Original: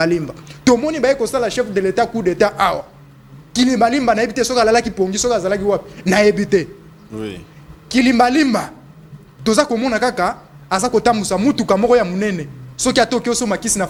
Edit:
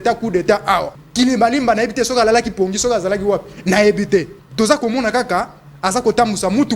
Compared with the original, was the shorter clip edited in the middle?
yes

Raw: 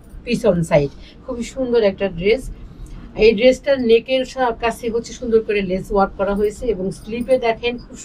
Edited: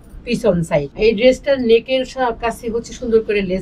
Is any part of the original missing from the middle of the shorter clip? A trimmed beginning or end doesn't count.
yes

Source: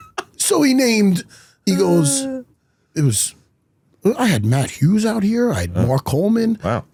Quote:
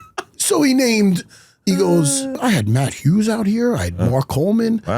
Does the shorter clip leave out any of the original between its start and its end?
yes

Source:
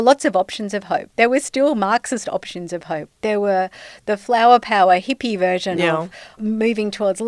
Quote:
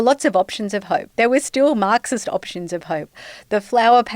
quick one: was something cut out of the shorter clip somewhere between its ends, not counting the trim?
yes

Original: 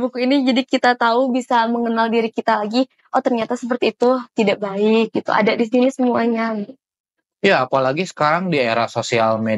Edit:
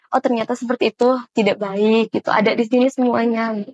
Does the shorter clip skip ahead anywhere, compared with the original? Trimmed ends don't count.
no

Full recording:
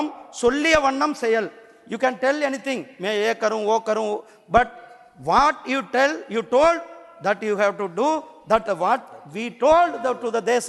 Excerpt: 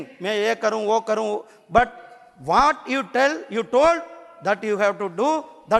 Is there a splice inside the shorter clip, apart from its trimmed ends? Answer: no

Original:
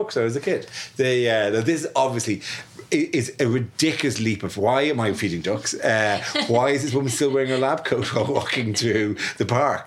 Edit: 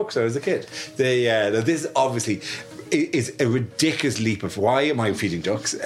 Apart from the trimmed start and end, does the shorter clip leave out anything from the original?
no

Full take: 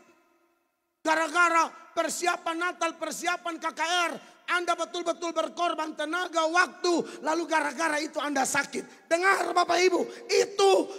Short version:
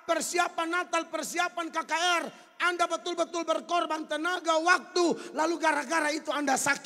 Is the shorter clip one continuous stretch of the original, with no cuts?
yes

